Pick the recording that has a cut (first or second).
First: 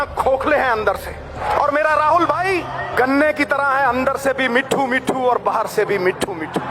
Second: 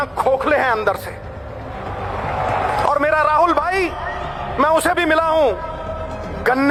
first